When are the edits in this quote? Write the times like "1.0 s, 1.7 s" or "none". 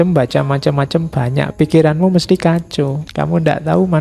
3.0 s

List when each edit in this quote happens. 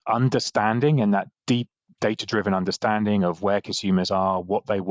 none

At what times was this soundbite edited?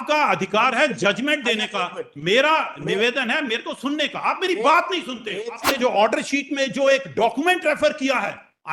5.6 s

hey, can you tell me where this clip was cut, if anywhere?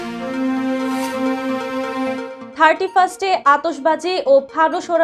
2.4 s

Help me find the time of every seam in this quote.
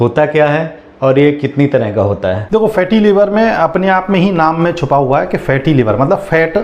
none

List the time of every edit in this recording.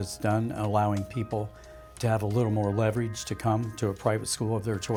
none

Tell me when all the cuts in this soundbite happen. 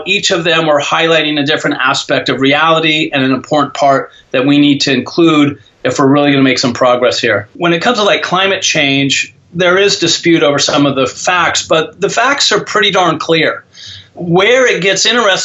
7.5 s

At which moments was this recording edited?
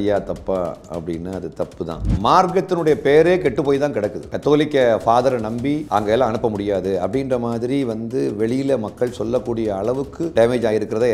2.1 s, 4.3 s, 5.8 s, 10.3 s

